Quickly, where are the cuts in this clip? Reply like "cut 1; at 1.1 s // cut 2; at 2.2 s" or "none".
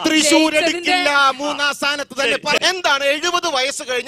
cut 1; at 2.6 s